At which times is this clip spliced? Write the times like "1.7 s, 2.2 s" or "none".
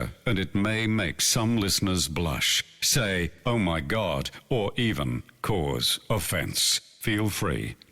none